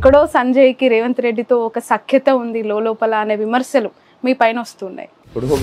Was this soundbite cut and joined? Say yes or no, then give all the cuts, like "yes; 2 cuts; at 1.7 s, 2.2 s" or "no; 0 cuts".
no; 0 cuts